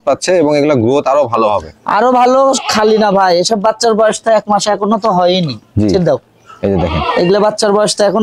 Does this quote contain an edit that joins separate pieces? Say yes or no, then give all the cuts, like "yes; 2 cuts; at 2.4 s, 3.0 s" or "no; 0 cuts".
no; 0 cuts